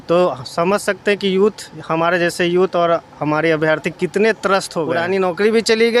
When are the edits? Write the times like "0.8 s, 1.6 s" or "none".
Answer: 4.8 s

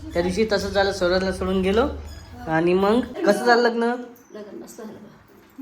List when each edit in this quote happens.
3.1 s

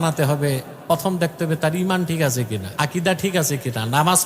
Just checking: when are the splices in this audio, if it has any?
2.6 s

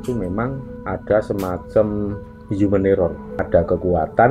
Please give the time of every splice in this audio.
3.4 s

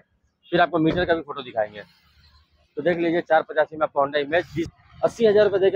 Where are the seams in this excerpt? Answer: 4.7 s

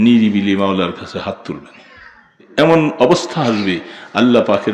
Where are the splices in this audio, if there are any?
2.4 s

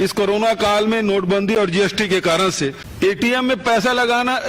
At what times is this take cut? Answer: 2.8 s

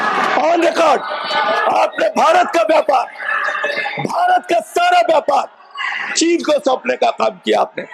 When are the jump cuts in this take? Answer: none

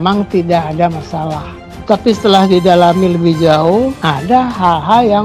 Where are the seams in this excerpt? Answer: 4.0 s

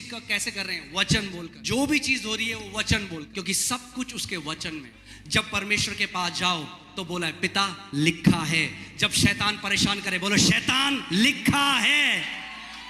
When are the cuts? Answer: 1.6 s, 3.3 s, 5.0 s

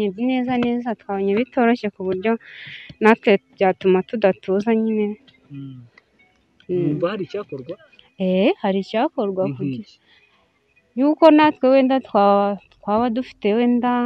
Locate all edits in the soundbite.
none

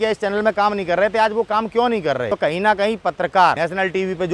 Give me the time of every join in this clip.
2.3 s, 3.6 s

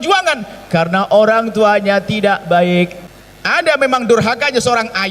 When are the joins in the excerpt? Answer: 3.0 s

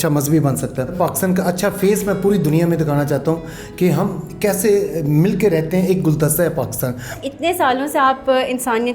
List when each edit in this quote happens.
0.9 s, 7.1 s

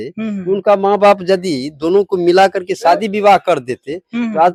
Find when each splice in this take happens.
none

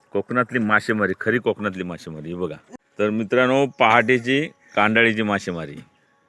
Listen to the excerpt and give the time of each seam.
2.7 s

